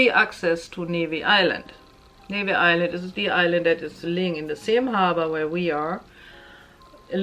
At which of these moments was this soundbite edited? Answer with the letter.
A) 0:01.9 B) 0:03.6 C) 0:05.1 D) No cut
D